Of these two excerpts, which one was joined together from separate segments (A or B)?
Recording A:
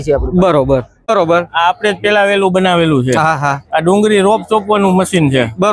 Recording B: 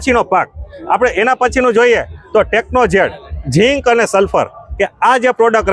A